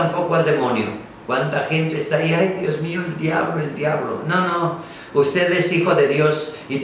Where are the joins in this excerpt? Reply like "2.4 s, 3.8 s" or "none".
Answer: none